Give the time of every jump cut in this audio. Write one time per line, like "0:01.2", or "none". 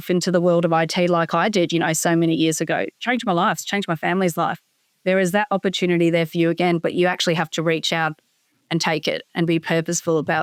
none